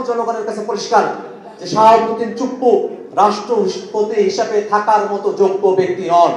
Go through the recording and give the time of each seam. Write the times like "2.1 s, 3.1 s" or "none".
none